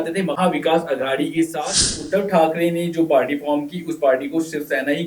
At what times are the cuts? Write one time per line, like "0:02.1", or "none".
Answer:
0:02.0